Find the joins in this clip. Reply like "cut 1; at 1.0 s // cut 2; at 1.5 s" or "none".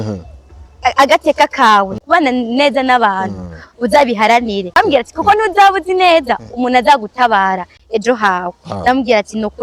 cut 1; at 2.0 s // cut 2; at 4.8 s